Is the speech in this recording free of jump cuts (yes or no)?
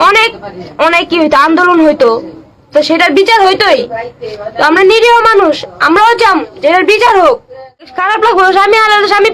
no